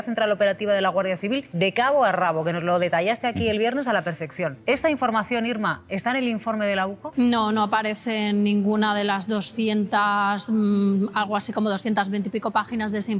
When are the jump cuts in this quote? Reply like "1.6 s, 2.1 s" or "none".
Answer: 1.5 s, 4.6 s, 7.3 s